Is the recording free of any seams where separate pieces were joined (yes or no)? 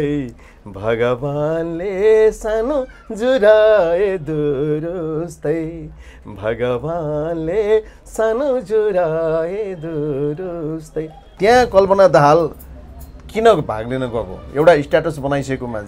no